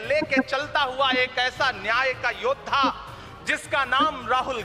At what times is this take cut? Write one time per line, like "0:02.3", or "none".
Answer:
none

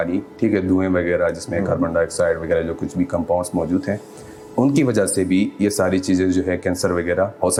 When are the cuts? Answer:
none

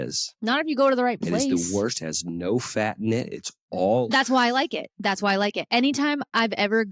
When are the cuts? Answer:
none

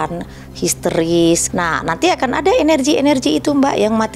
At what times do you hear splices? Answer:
0:01.5

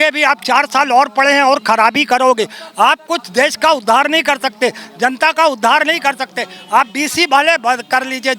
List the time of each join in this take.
none

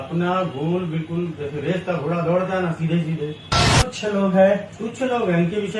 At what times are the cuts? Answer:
0:03.7

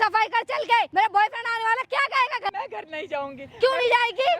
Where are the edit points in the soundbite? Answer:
0:00.9
0:02.5

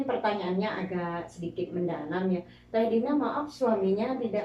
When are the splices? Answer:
none

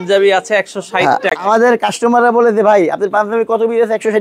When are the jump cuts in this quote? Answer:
none

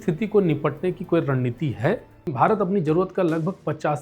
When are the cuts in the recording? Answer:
0:02.3

